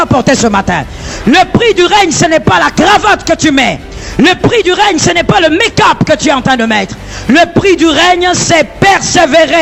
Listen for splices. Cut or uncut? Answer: uncut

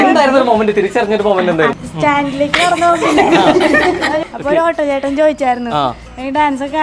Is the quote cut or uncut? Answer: cut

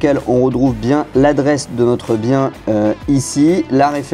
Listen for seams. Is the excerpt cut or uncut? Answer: uncut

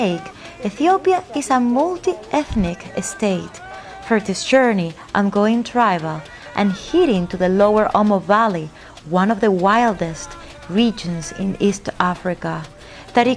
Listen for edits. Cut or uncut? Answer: cut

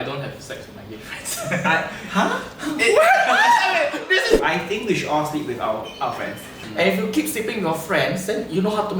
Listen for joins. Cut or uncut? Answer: cut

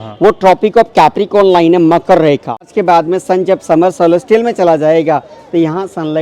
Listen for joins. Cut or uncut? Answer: cut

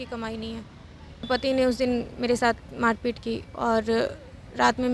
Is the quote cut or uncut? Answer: cut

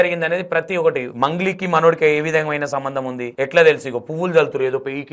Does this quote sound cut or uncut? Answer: cut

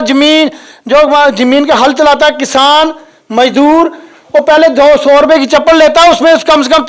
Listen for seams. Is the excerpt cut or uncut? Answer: uncut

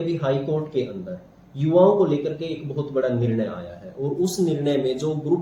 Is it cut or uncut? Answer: uncut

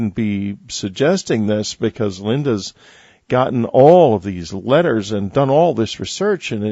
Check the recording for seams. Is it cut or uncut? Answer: cut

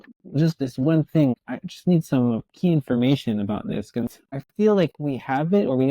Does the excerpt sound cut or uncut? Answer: cut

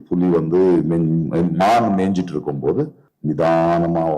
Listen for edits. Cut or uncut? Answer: cut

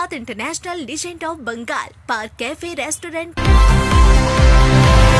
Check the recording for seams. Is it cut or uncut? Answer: cut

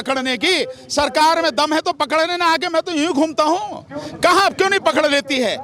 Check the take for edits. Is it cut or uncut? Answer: uncut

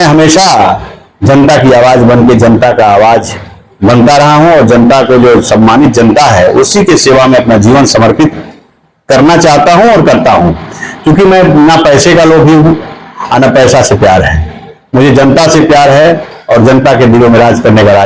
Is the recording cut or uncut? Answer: uncut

